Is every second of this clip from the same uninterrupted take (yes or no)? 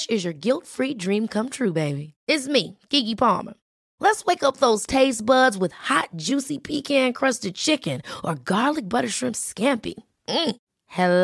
yes